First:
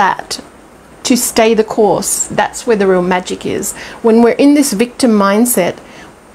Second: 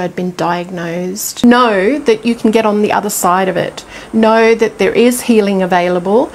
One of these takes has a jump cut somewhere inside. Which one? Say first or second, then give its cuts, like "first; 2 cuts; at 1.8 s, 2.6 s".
second; 1 cut; at 1.3 s